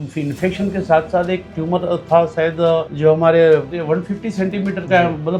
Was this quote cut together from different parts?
yes; 2 cuts; at 2.9 s, 3.7 s

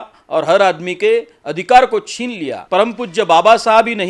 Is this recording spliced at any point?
yes; 1 cut; at 2.5 s

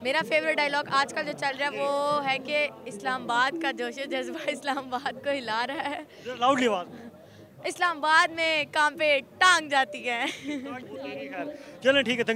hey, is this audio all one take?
yes; 0 cuts

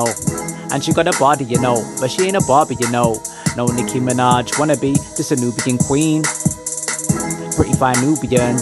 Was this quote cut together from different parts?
no; 0 cuts

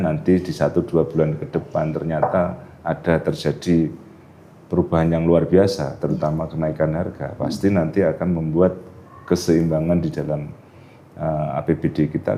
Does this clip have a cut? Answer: no; 0 cuts

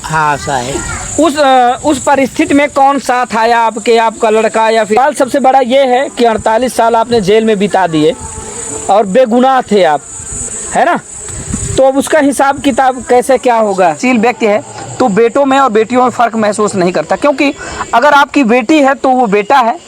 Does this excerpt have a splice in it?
yes; 2 cuts; at 5.0 s, 14.0 s

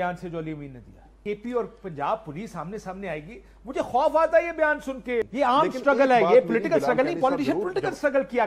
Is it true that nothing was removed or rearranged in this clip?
no; 2 cuts; at 1.1 s, 5.2 s

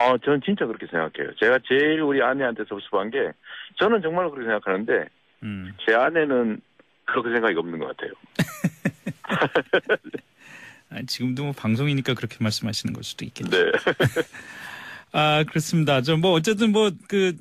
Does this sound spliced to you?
yes; 1 cut; at 8.6 s

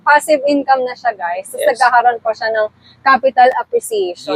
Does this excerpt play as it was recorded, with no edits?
yes; 0 cuts

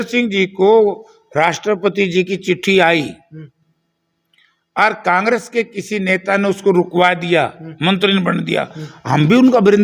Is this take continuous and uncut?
yes; 0 cuts

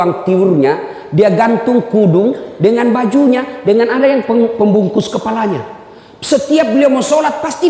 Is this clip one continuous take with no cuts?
yes; 0 cuts

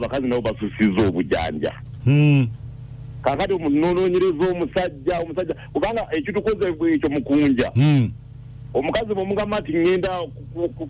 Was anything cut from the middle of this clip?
no; 0 cuts

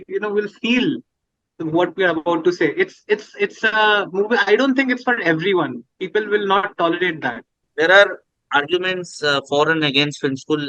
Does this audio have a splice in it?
yes; 1 cut; at 7.6 s

